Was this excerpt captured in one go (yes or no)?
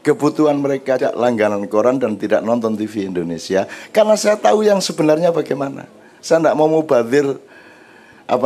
no